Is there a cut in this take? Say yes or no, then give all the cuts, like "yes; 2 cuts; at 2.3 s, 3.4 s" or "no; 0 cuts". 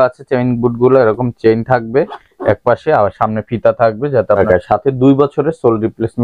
yes; 1 cut; at 4.4 s